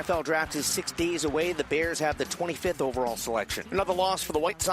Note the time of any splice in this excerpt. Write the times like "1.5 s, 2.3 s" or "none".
3.6 s